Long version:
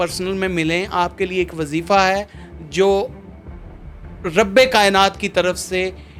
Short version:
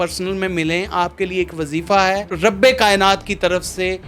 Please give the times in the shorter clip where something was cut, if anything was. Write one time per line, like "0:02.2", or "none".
0:02.3